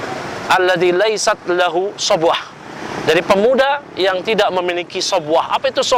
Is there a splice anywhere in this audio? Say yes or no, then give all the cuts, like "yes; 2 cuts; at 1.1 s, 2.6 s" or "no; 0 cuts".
no; 0 cuts